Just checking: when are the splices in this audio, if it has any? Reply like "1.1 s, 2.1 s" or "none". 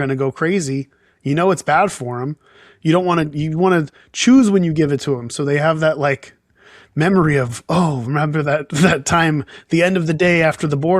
none